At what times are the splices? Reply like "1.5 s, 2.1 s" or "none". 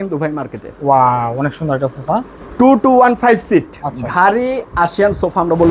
none

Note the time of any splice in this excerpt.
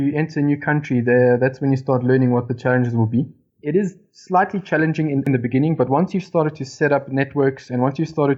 2.5 s, 3.5 s

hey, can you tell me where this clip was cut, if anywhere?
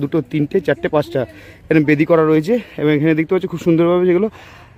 none

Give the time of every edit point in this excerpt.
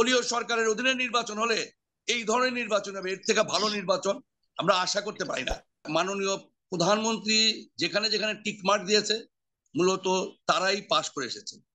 5.9 s

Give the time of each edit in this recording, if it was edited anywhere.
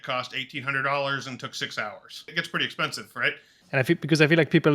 2.3 s, 3.5 s

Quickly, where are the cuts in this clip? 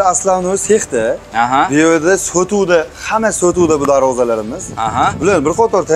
none

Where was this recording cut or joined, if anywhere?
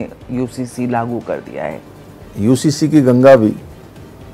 1.7 s

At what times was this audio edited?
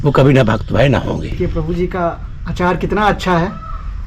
1.4 s

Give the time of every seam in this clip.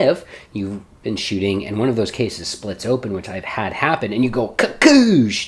none

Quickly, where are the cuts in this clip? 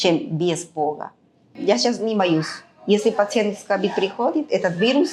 1.5 s

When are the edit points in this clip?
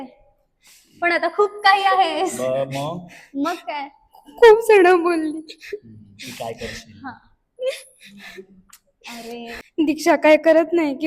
9.7 s

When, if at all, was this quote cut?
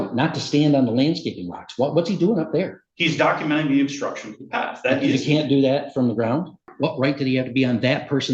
6.6 s

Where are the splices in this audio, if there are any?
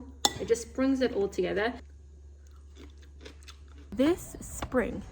1.9 s, 3.8 s

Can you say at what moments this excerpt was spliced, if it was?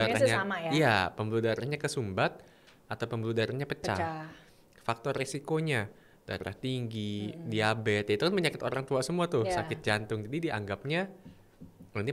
none

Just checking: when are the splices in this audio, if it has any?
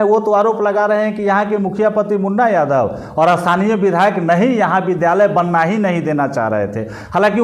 none

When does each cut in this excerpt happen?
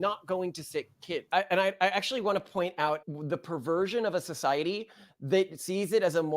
1.2 s, 3.0 s

